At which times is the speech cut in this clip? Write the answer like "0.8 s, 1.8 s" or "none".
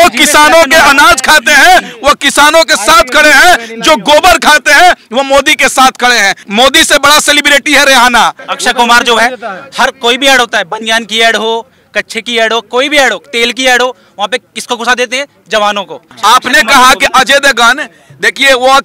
6.4 s, 8.5 s, 16.0 s